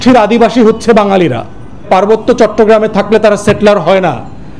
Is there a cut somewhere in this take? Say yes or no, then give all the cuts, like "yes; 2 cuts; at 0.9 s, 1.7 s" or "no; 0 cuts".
yes; 1 cut; at 1.9 s